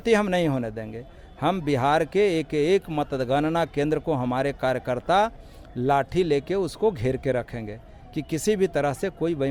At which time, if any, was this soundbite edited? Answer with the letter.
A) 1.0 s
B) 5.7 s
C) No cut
C